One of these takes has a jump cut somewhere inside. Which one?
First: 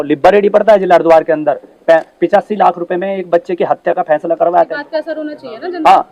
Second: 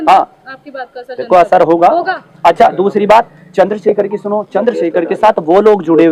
first; 1 cut; at 4.8 s

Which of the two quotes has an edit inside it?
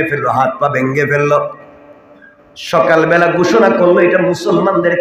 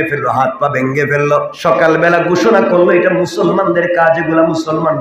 second; 1 cut; at 1.5 s

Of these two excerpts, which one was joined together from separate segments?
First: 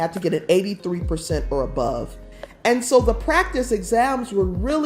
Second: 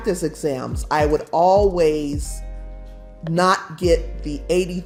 first; 1 cut; at 2.1 s

